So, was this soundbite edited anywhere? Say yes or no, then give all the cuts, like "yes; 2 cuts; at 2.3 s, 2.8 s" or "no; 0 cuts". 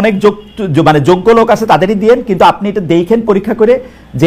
no; 0 cuts